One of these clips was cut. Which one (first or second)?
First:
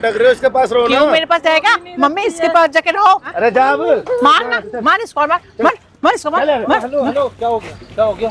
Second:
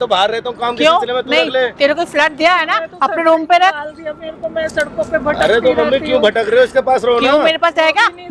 first